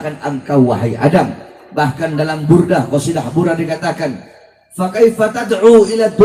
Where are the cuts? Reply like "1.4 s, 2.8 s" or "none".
none